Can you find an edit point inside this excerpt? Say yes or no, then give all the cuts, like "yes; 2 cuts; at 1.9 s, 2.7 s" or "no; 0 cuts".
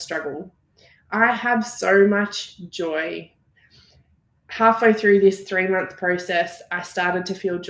no; 0 cuts